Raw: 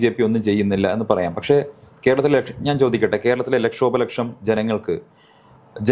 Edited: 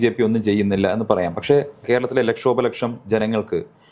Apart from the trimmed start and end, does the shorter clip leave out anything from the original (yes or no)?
yes